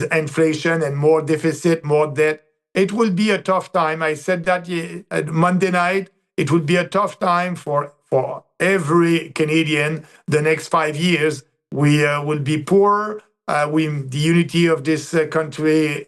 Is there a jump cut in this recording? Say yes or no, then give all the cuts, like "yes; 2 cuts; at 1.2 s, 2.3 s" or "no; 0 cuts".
no; 0 cuts